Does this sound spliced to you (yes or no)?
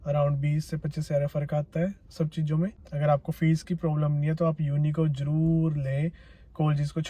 yes